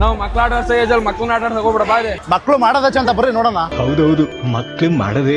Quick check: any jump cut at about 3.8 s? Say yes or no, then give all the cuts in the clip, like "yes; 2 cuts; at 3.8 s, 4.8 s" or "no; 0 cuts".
no; 1 cut; at 2.1 s